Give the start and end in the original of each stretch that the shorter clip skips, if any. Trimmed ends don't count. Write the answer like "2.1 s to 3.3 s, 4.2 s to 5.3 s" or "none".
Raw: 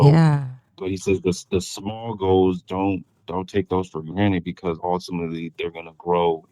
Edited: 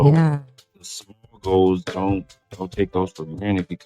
0.9 s to 1.7 s